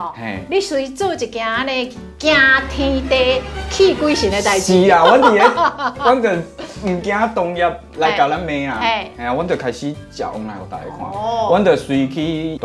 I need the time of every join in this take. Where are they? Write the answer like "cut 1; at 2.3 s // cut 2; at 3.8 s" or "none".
none

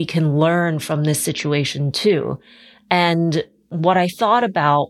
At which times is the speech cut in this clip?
cut 1; at 3.6 s

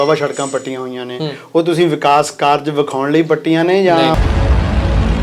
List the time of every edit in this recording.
cut 1; at 4.1 s

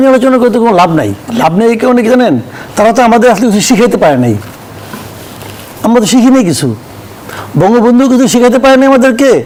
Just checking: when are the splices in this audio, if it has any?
none

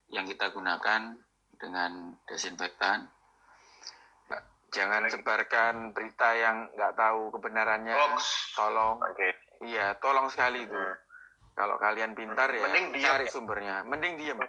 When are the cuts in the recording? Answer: cut 1; at 4.3 s

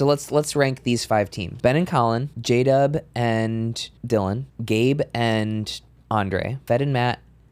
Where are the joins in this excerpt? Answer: cut 1; at 1.4 s // cut 2; at 2.3 s // cut 3; at 3.9 s // cut 4; at 4.5 s // cut 5; at 6.6 s

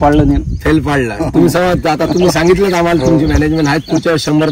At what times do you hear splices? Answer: none

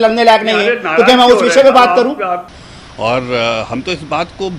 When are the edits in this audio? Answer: cut 1; at 2.4 s

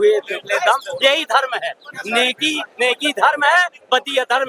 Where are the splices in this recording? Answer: none

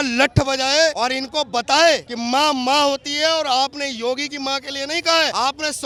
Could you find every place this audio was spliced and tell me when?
none

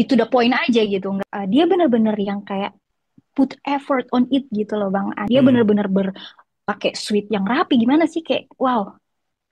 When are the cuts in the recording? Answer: cut 1; at 1.2 s // cut 2; at 5.2 s

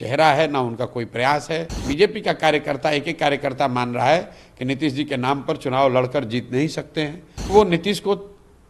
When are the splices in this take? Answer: cut 1; at 1.8 s // cut 2; at 7.3 s

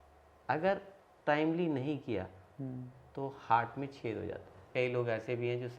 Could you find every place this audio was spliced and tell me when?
cut 1; at 4.7 s

